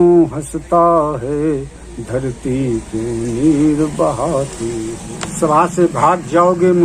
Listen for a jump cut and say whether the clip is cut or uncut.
cut